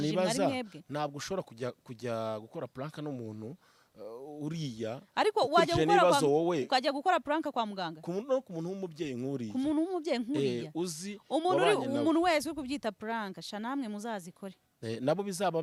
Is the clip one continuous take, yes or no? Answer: yes